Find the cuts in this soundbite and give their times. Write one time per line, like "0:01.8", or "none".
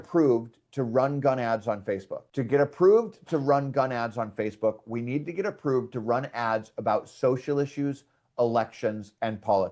none